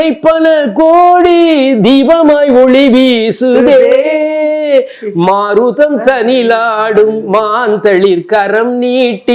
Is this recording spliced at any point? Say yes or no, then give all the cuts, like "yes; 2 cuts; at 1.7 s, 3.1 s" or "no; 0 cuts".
no; 0 cuts